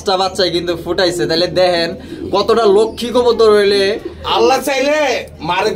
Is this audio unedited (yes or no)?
yes